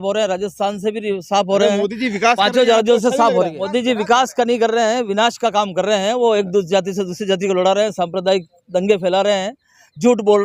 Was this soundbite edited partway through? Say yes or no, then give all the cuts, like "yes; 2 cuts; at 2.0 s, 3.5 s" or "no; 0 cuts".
yes; 1 cut; at 3.6 s